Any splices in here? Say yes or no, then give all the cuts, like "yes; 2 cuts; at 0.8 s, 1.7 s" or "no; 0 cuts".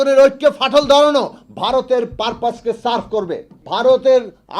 yes; 1 cut; at 3.5 s